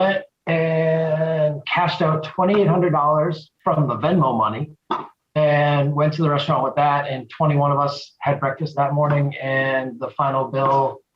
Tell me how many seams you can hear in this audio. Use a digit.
2